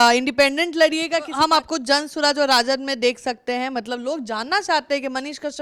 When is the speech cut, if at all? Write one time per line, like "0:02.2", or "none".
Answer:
0:01.2